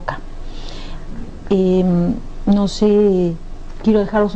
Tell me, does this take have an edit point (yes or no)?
yes